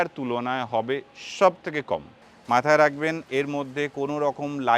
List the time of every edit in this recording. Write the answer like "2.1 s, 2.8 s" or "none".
2.1 s, 3.2 s